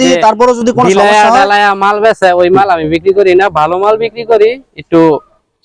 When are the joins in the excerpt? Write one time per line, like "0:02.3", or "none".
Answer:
none